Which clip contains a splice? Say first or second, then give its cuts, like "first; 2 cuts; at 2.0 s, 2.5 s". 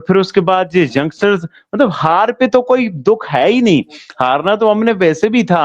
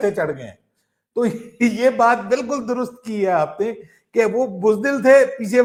first; 1 cut; at 1.6 s